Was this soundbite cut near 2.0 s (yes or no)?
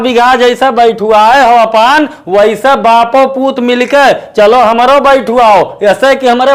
no